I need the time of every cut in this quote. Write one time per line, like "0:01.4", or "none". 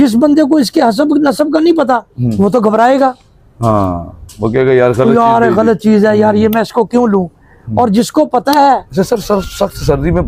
0:08.9